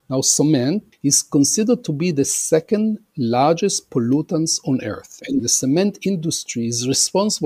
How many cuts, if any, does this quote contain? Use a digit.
2